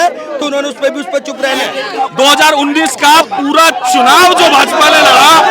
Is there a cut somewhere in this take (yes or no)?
yes